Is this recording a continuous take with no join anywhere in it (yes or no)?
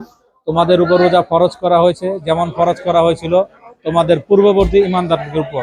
yes